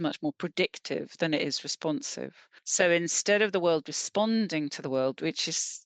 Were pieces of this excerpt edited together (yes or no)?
yes